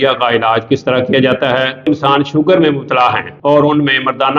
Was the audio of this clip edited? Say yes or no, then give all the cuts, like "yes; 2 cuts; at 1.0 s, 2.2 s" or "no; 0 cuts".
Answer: yes; 2 cuts; at 1.9 s, 3.3 s